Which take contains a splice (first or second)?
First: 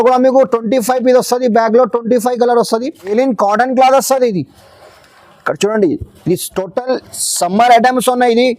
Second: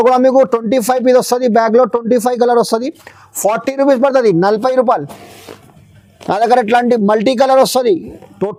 first